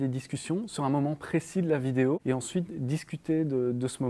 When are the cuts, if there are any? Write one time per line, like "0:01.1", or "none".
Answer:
0:02.2